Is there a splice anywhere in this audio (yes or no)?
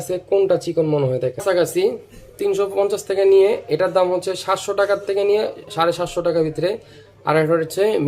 yes